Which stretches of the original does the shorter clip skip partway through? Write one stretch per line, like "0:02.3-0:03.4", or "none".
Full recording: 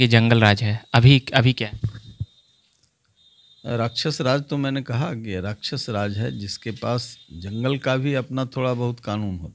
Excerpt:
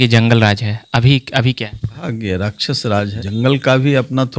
0:02.0-0:05.1
0:06.2-0:07.3